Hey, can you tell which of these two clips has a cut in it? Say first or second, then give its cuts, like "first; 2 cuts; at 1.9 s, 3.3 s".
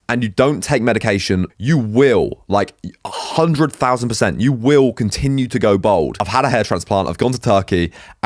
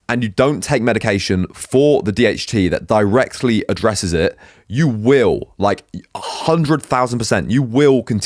first; 2 cuts; at 1.5 s, 6.2 s